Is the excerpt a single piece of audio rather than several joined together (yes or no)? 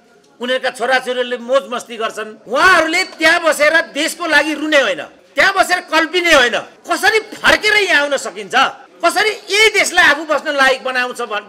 no